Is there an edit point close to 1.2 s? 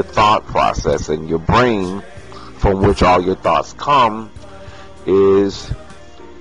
no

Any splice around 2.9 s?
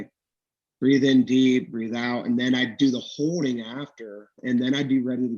no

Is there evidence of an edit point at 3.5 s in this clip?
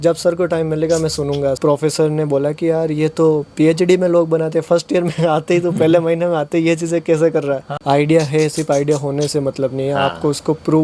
no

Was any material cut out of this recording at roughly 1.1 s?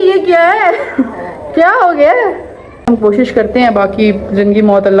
no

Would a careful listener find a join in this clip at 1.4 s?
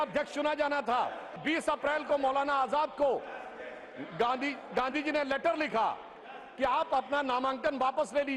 yes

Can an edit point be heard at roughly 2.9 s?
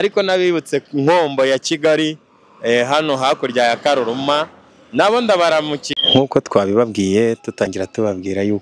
no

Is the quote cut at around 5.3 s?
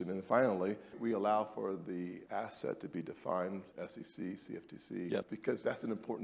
yes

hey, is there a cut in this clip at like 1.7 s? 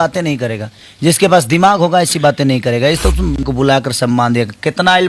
no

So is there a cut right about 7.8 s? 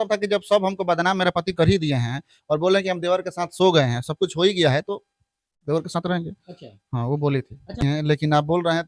yes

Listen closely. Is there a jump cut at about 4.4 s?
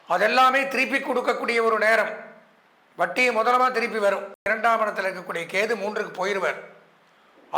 yes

